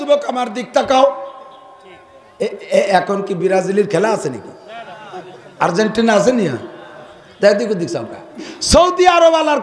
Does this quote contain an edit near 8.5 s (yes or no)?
yes